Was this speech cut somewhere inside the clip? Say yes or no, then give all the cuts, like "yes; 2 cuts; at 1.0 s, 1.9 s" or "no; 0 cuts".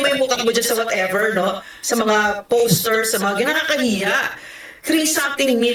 no; 0 cuts